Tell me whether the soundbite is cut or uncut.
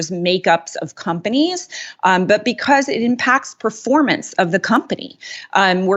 uncut